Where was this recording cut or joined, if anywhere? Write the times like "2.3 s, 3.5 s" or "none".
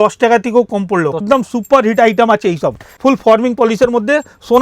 1.2 s, 2.9 s